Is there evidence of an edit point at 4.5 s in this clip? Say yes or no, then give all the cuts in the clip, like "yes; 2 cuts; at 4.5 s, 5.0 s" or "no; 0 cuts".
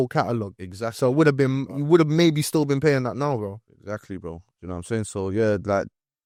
no; 0 cuts